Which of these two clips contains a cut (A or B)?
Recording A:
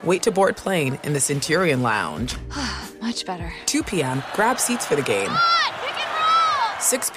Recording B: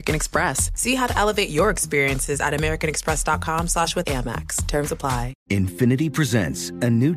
B